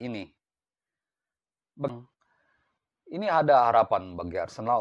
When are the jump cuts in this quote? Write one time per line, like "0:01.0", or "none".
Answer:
0:01.9